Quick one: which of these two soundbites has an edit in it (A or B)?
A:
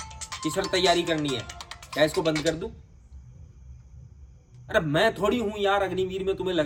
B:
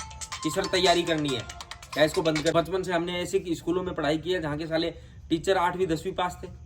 B